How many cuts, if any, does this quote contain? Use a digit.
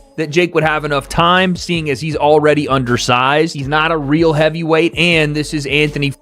0